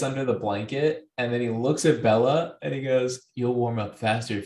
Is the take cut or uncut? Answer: uncut